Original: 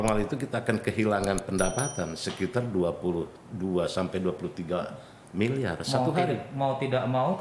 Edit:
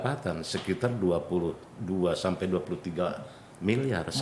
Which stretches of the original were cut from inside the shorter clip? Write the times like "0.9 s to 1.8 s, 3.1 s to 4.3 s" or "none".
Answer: none